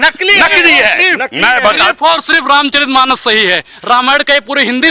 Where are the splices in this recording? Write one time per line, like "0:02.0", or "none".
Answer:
none